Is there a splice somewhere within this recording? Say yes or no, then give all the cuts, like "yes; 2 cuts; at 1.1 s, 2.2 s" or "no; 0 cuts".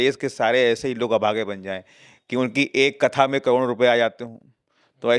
no; 0 cuts